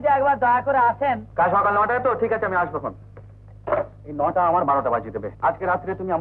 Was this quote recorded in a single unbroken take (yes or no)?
no